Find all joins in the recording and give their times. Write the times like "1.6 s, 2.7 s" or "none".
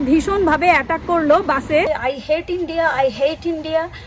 1.9 s